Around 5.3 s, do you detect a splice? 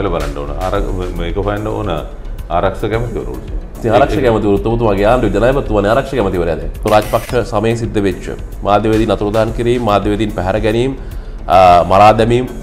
no; 1 cut; at 6.8 s

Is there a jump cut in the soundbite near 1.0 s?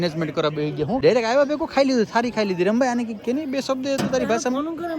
yes; 1 cut; at 1.0 s

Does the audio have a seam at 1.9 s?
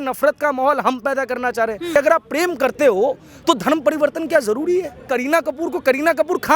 yes; 2 cuts; at 1.9 s, 5.0 s

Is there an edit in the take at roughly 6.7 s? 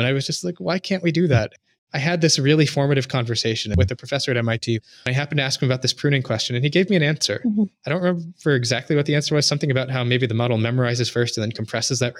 no; 3 cuts; at 1.6 s, 3.7 s, 4.8 s

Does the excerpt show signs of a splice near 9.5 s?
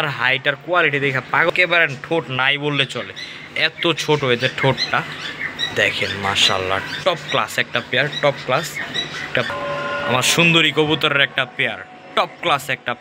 yes; 2 cuts; at 1.5 s, 9.5 s

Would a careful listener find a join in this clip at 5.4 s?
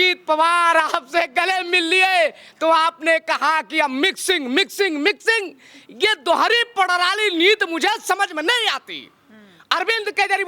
no; 0 cuts

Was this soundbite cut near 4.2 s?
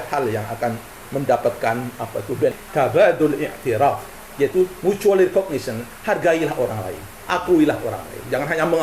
no; 1 cut; at 2.6 s

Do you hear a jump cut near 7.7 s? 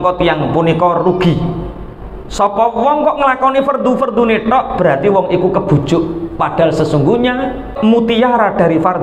yes; 1 cut; at 7.7 s

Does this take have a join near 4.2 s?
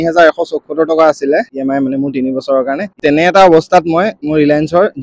yes; 2 cuts; at 2.9 s, 4.2 s

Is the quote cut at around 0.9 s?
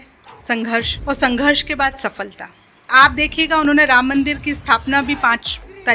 yes; 2 cuts; at 0.9 s, 2.9 s

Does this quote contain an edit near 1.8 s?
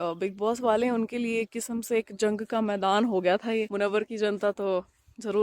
no; 1 cut; at 3.7 s

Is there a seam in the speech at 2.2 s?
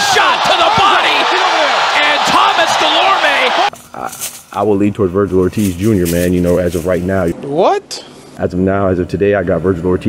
no; 3 cuts; at 3.7 s, 7.4 s, 8.2 s

